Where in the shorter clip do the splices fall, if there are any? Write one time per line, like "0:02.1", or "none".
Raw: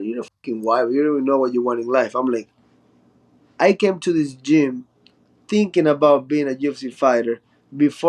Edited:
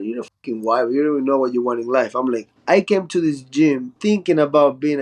0:02.5
0:03.9